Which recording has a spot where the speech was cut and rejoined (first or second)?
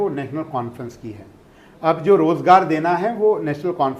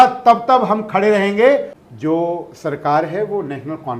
second